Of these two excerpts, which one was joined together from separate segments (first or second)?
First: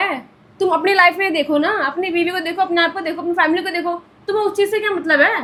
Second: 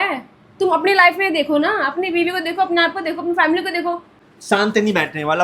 second